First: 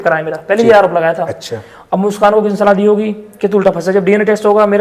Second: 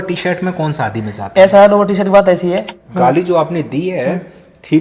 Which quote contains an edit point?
second; 1 cut; at 2.8 s

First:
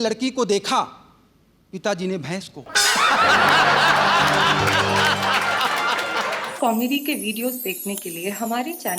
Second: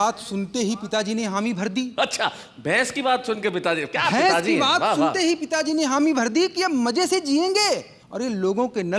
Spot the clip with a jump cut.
first; 1 cut; at 6.4 s

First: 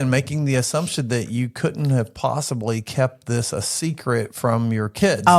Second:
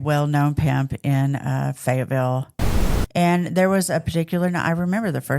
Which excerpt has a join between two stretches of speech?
second; 1 cut; at 2.6 s

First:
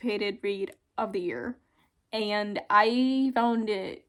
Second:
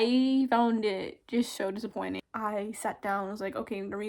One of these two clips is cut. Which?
second; 1 cut; at 2.2 s

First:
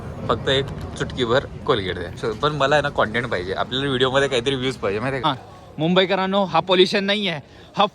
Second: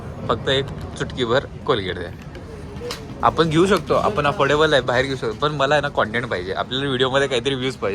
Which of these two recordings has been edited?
first; 2 cuts; at 2.2 s, 5.2 s

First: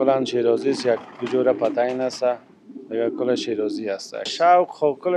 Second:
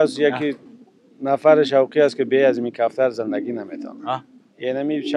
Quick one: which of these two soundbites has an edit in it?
first; 1 cut; at 4.2 s

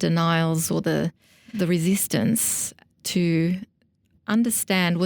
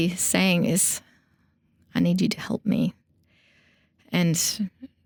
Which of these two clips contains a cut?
first; 1 cut; at 1.4 s

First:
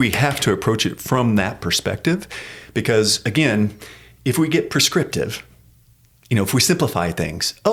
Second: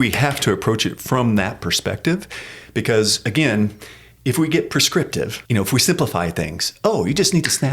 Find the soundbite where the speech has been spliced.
second; 1 cut; at 5.4 s

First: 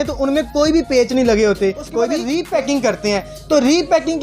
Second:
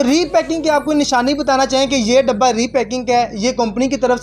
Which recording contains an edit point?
first; 1 cut; at 2.1 s

